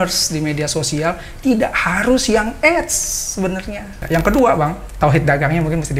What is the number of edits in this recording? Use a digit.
2